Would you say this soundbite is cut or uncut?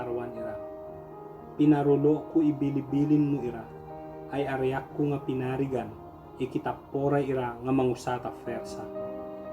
cut